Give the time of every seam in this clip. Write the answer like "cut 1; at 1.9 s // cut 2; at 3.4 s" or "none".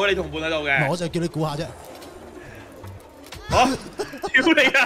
cut 1; at 1.1 s